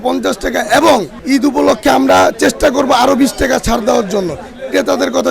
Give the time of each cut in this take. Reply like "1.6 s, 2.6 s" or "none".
1.1 s